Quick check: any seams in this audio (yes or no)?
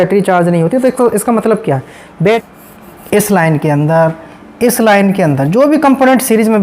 yes